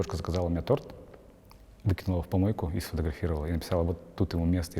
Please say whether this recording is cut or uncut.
uncut